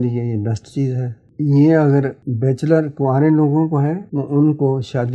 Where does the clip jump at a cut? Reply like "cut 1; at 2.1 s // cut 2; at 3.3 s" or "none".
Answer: cut 1; at 2.2 s // cut 2; at 4.1 s